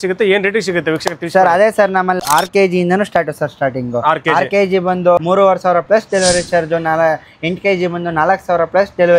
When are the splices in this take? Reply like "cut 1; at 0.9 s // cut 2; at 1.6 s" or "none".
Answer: cut 1; at 2.2 s // cut 2; at 5.2 s